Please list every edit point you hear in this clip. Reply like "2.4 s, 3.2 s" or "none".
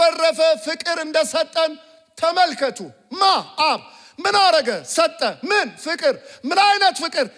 none